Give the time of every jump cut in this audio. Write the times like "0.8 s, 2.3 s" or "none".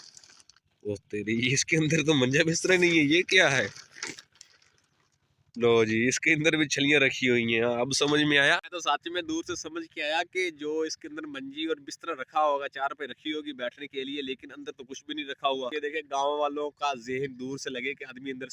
8.7 s, 15.7 s